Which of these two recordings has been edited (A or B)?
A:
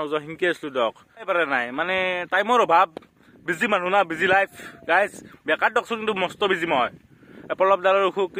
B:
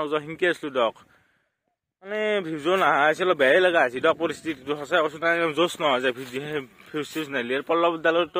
A